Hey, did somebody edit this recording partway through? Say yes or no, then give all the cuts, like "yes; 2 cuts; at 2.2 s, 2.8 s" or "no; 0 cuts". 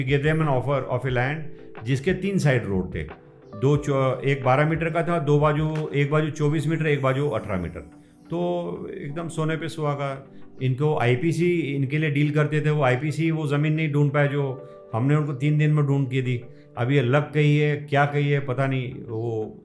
no; 0 cuts